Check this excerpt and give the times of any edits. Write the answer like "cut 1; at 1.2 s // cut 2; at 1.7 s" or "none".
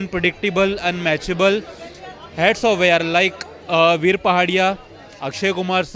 none